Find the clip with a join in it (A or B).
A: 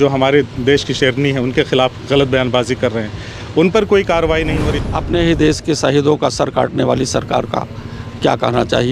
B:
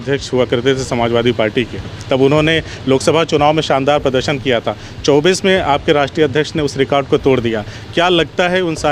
A